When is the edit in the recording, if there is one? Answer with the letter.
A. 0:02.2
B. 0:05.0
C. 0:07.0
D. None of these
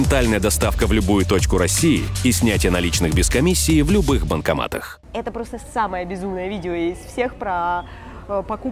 B